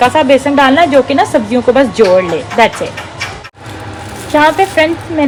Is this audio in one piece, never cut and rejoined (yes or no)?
yes